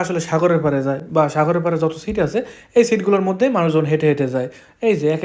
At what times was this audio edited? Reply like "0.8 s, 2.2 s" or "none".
none